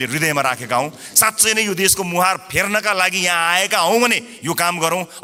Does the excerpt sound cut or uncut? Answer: uncut